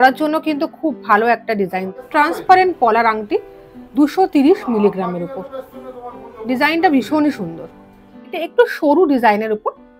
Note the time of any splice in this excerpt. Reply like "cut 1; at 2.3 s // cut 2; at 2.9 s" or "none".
cut 1; at 2.0 s // cut 2; at 8.3 s